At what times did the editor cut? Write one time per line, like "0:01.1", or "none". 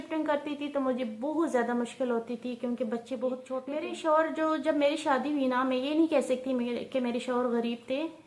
0:03.6